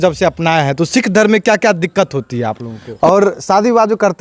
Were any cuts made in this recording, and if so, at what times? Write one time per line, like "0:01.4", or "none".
0:02.8